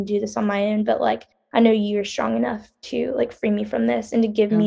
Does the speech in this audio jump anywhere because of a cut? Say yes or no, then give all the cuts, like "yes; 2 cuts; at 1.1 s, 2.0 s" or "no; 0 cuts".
no; 0 cuts